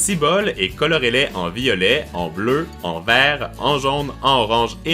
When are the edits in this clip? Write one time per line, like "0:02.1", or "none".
0:03.8